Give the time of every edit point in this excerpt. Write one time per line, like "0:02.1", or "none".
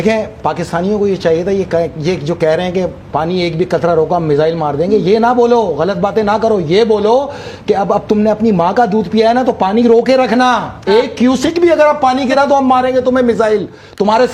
none